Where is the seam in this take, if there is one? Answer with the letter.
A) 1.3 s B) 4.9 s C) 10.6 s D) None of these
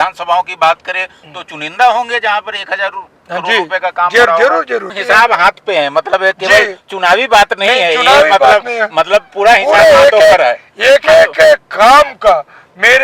B